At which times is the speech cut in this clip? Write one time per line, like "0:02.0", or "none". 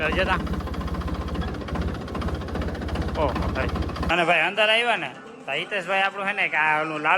0:04.1